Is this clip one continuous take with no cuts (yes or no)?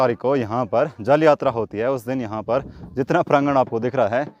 yes